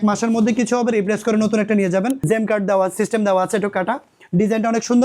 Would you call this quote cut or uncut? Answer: cut